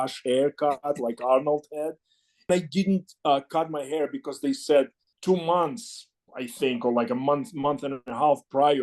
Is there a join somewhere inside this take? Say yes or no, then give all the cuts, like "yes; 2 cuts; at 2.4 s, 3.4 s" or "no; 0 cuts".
yes; 2 cuts; at 2.5 s, 5.1 s